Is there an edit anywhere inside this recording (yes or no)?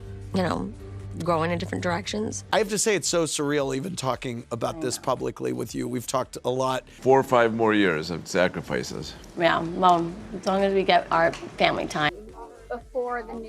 yes